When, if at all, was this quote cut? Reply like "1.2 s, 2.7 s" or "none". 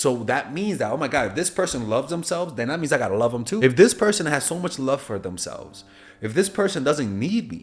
3.6 s